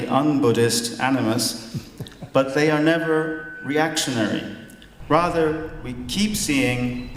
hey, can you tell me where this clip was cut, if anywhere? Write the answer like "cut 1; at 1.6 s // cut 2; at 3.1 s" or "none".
none